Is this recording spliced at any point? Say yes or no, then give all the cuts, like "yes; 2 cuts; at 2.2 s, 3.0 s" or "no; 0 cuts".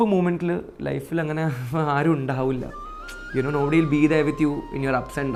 no; 0 cuts